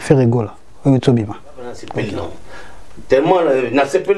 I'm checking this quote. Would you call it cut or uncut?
cut